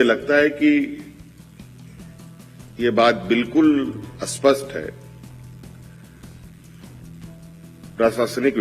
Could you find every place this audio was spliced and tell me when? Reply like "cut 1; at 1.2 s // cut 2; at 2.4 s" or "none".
cut 1; at 5.0 s // cut 2; at 7.5 s